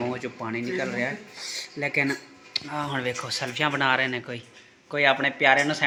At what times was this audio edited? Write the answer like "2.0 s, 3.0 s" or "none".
none